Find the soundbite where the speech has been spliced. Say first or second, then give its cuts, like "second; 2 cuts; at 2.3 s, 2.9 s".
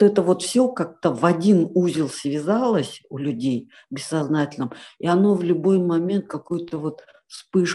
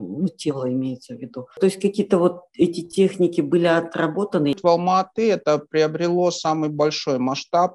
second; 2 cuts; at 1.6 s, 4.6 s